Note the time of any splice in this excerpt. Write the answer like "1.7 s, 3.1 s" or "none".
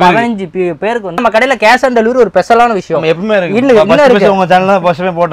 1.2 s